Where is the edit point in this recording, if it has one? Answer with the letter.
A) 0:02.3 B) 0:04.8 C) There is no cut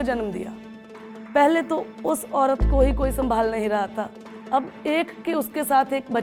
C